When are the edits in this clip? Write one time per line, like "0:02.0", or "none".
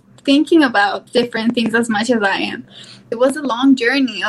0:01.0
0:03.1